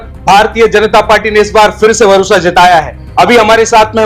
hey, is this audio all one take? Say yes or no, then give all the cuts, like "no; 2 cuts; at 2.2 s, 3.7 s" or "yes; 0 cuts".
no; 1 cut; at 3.0 s